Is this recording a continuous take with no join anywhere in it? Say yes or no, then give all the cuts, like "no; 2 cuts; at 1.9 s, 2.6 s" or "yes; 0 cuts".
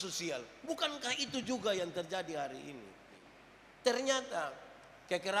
no; 1 cut; at 3.2 s